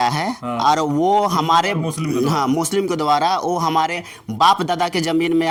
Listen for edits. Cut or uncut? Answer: uncut